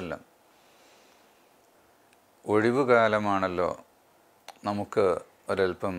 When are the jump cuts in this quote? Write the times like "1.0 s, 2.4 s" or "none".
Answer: 1.7 s